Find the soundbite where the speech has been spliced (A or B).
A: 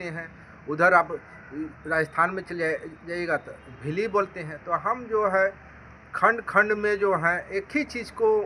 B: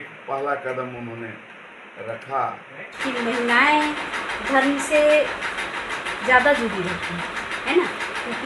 B